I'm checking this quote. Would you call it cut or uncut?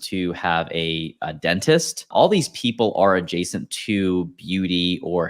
cut